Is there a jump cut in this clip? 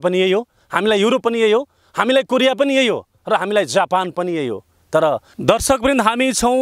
yes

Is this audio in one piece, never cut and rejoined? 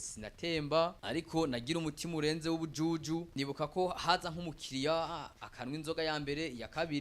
no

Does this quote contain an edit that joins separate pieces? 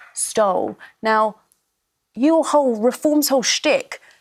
no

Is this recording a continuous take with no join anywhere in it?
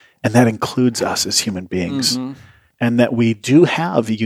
yes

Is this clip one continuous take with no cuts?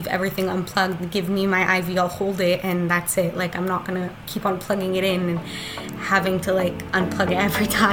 yes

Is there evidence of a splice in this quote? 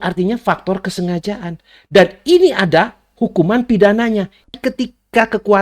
yes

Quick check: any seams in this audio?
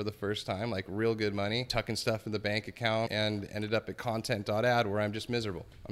yes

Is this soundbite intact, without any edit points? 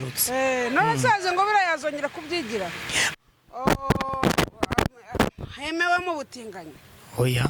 no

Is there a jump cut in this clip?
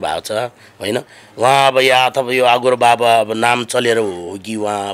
no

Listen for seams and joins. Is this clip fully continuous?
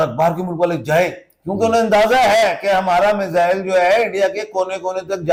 yes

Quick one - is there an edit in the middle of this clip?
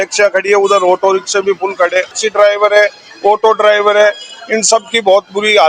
yes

